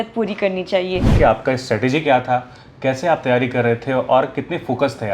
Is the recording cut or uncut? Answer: cut